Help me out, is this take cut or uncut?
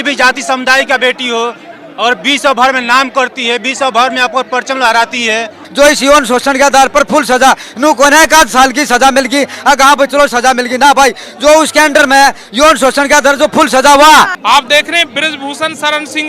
cut